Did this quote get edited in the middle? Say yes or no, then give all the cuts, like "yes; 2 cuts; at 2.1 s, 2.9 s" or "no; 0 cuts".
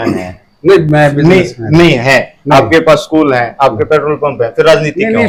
no; 0 cuts